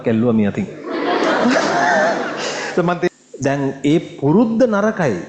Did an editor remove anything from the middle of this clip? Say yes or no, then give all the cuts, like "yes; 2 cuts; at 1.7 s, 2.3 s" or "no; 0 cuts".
yes; 1 cut; at 3.1 s